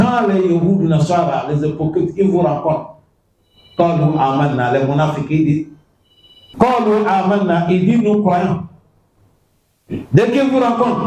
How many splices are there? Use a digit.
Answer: 1